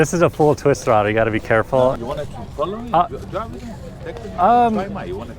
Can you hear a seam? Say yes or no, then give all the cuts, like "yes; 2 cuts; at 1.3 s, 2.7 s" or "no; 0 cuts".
no; 0 cuts